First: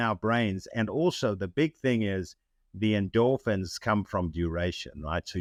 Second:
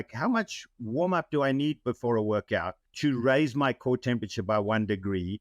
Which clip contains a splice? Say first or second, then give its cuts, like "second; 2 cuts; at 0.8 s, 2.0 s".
second; 1 cut; at 2.8 s